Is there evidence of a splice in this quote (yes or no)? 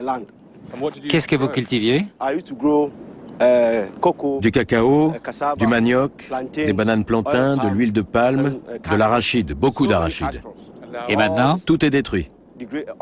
no